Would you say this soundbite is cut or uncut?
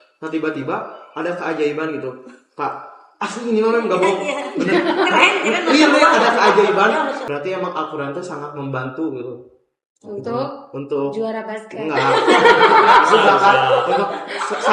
cut